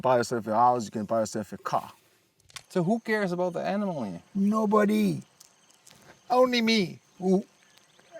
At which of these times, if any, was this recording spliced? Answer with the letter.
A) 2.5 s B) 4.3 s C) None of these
A